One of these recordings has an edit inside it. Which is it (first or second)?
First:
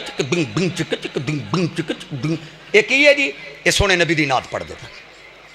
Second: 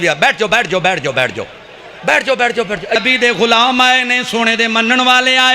second